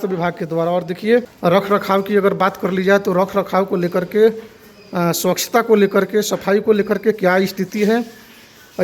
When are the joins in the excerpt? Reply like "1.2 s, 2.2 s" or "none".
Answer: 1.3 s